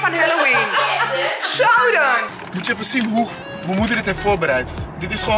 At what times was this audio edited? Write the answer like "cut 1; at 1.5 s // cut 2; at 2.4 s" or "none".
cut 1; at 2.3 s